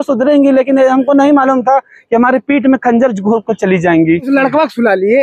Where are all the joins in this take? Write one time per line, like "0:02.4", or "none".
0:04.3